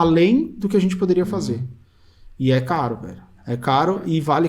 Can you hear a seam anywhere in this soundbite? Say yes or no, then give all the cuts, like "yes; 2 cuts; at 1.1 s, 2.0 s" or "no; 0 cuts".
yes; 1 cut; at 3.3 s